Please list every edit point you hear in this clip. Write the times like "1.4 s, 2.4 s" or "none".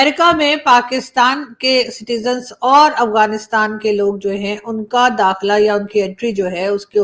none